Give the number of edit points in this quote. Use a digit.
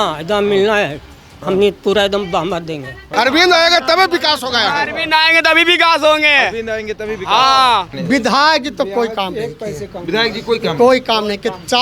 2